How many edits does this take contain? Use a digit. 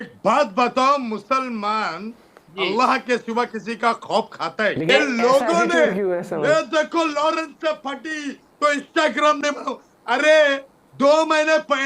1